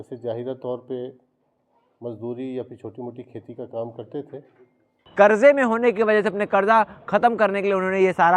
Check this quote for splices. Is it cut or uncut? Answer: cut